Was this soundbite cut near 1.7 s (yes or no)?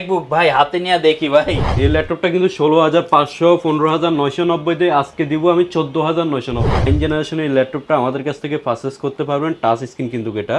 yes